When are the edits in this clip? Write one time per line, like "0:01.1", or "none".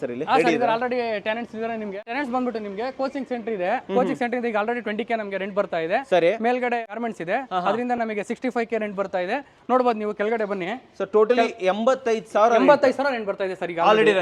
none